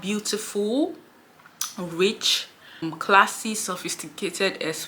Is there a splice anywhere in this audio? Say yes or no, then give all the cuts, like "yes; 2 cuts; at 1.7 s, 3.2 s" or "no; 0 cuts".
yes; 1 cut; at 2.8 s